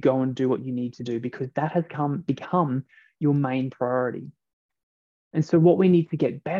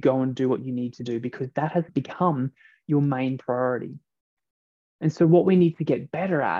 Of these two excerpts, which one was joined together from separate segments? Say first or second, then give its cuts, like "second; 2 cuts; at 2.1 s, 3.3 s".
second; 1 cut; at 1.9 s